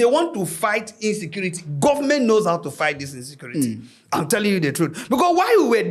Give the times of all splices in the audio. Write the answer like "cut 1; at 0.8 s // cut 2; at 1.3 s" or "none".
none